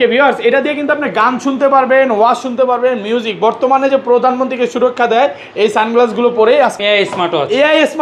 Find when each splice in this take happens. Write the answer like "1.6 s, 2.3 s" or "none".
6.8 s